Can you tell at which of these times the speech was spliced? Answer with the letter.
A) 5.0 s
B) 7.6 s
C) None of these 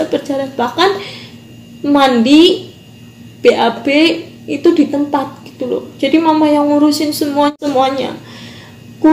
B